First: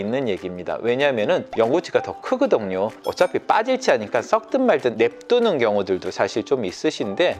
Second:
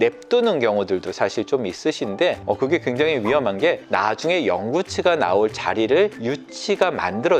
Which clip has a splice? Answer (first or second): first